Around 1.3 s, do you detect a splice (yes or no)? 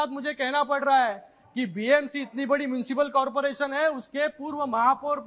no